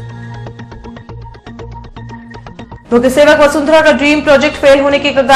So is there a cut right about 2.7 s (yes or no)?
yes